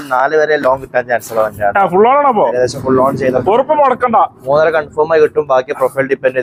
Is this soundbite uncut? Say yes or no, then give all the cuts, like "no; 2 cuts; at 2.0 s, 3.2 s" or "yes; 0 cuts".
yes; 0 cuts